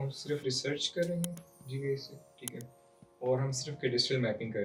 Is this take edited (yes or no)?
no